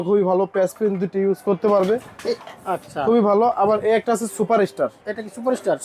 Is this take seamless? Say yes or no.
yes